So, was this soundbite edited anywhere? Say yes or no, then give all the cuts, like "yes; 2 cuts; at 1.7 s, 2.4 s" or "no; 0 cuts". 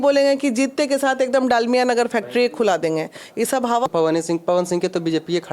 yes; 1 cut; at 3.9 s